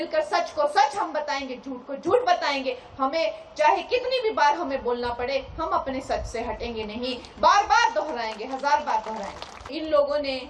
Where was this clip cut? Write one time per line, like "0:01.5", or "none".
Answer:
none